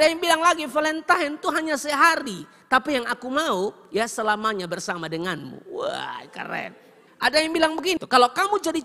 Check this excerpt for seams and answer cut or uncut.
uncut